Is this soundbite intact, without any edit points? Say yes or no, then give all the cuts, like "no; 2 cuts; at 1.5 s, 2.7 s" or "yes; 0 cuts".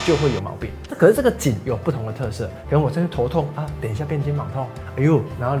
no; 1 cut; at 2.5 s